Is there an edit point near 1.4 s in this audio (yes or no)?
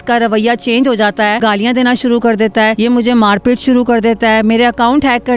yes